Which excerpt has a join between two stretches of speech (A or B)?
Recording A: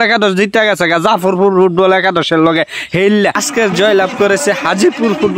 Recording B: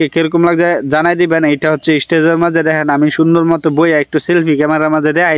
A